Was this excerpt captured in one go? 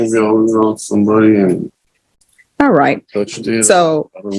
yes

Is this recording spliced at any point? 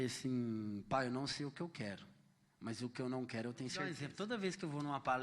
yes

